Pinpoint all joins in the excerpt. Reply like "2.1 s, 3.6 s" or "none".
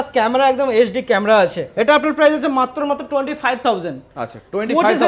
1.7 s